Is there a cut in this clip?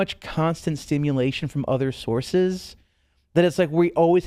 no; 0 cuts

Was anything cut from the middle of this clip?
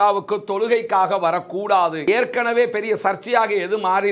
yes; 1 cut; at 2.0 s

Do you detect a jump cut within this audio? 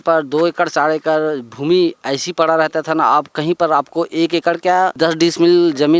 yes; 1 cut; at 4.9 s

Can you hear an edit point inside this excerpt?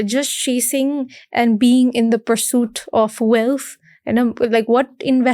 no; 0 cuts

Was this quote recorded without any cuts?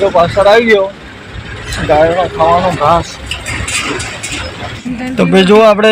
no; 1 cut; at 4.7 s

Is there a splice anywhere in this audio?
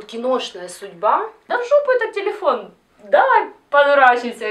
yes; 1 cut; at 1.4 s

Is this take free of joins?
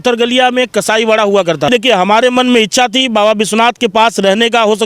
no; 1 cut; at 1.7 s

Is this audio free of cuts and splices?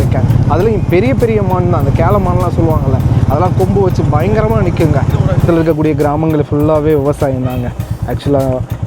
no; 1 cut; at 5.5 s

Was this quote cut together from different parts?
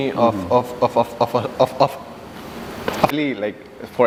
no; 0 cuts

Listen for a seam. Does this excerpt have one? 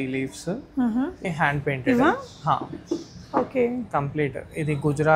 yes; 1 cut; at 1.2 s

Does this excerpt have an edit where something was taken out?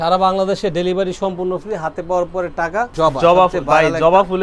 yes; 1 cut; at 2.9 s

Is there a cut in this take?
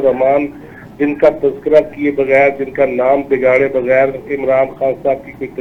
no; 0 cuts

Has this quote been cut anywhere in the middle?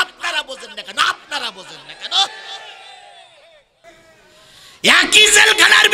yes; 1 cut; at 3.9 s

